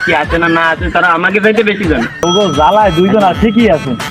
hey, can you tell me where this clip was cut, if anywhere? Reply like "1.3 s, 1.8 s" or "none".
2.2 s